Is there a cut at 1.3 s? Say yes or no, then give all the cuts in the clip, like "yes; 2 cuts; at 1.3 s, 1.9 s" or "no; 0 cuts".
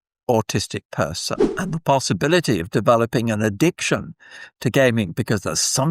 yes; 1 cut; at 1.3 s